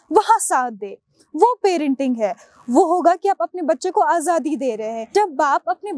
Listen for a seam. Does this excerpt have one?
yes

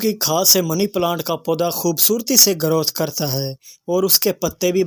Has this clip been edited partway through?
no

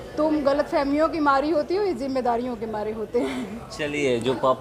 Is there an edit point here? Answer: no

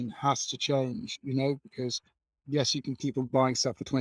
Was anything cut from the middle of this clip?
no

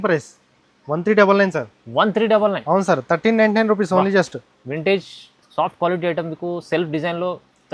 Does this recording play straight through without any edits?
yes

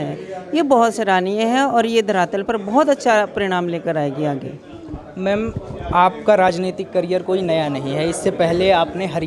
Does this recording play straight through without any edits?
yes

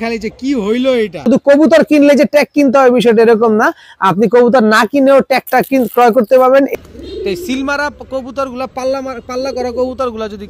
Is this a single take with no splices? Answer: no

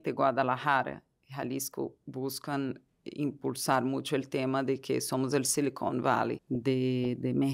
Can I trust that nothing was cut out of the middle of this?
no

